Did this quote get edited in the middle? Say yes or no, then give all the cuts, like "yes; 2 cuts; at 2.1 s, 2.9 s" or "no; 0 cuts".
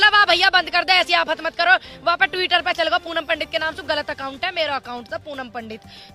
no; 0 cuts